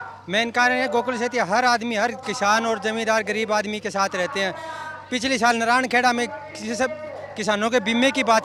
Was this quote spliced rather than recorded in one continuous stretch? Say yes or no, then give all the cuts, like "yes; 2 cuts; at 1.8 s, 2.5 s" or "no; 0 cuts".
no; 0 cuts